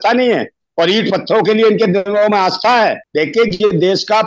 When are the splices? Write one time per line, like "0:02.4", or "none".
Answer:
0:03.0